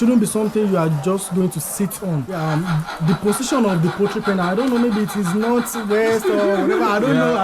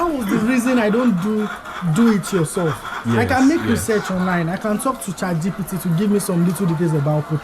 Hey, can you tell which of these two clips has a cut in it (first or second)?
first